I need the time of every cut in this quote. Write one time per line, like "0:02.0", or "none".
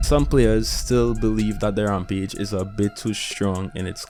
none

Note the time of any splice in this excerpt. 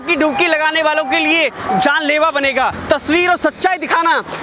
0:02.8

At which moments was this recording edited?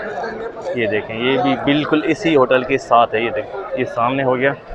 none

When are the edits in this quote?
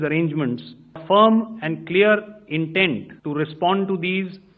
0:01.0
0:03.1

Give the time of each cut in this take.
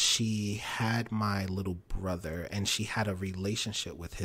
none

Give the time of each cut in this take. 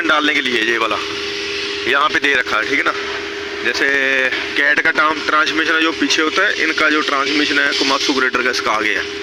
none

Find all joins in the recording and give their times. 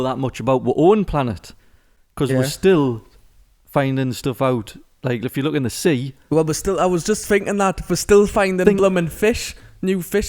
none

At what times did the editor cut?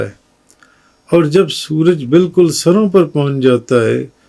none

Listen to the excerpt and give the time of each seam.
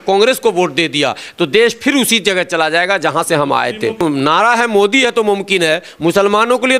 0:04.0

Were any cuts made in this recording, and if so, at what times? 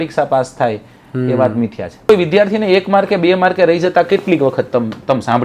0:02.1

